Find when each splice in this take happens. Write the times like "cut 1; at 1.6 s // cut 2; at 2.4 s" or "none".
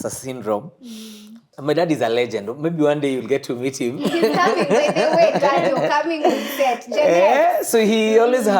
cut 1; at 1.4 s